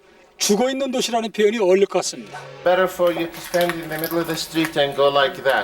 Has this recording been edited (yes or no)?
yes